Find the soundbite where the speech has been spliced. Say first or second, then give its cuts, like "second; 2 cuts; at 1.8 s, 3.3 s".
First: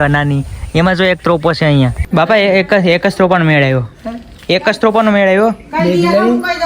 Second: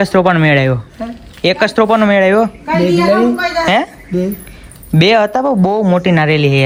first; 1 cut; at 2.1 s